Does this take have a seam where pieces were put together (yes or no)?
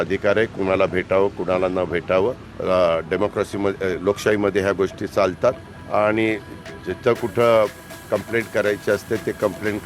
yes